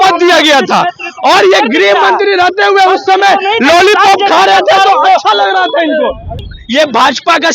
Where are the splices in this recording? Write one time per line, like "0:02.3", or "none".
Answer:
0:06.5